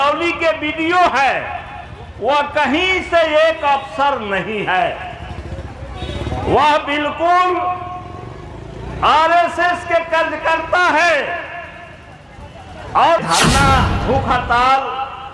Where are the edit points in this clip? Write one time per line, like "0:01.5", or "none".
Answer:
0:13.2